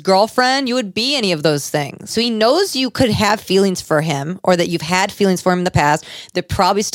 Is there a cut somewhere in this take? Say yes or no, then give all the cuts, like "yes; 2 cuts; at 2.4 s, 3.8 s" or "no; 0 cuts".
yes; 1 cut; at 2.1 s